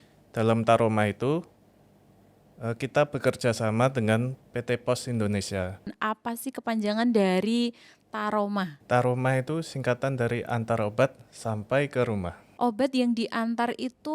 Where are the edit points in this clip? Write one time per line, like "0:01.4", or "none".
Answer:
0:05.9
0:08.8
0:12.4